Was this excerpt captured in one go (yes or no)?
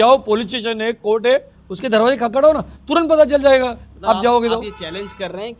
yes